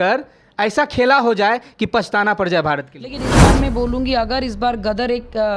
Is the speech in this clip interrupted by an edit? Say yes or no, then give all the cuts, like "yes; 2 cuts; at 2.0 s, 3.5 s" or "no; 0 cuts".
yes; 1 cut; at 3.4 s